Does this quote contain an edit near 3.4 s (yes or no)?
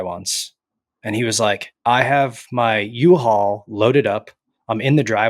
no